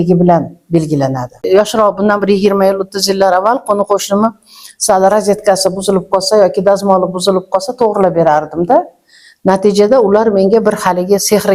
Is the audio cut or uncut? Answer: cut